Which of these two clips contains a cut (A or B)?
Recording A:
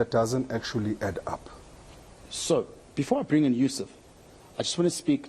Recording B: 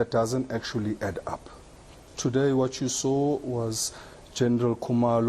B